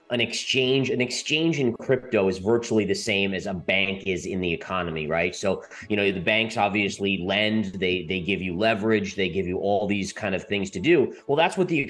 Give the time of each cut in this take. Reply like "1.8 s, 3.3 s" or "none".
none